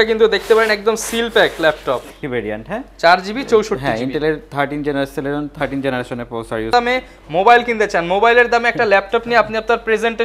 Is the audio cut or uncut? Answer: cut